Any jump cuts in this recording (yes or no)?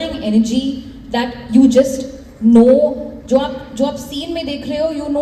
no